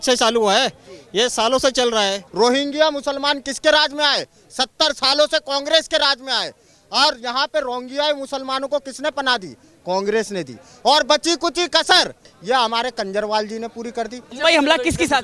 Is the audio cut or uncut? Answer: cut